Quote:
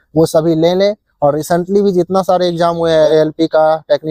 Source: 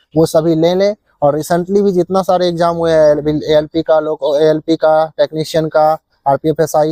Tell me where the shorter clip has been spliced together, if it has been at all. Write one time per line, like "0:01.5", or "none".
0:03.1